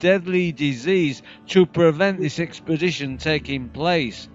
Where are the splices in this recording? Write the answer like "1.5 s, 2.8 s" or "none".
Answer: 2.6 s

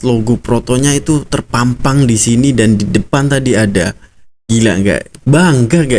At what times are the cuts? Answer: none

